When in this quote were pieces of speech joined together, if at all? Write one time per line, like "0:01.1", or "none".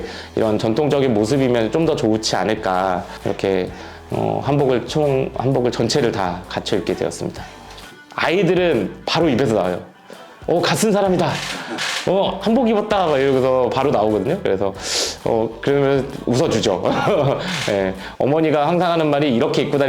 0:03.1
0:07.8